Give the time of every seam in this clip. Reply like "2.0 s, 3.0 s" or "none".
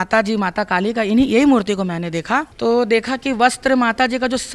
2.5 s